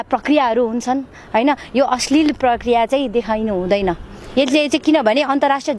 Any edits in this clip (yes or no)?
no